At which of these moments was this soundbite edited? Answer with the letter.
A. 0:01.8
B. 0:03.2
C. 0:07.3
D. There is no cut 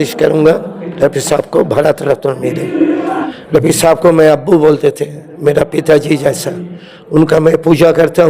B